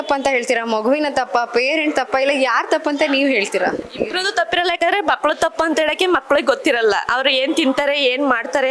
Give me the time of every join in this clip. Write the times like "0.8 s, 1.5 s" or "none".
none